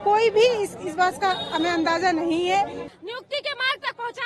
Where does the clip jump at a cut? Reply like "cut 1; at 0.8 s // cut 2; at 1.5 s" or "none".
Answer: cut 1; at 2.9 s